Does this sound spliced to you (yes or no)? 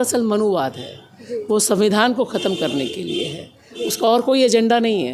no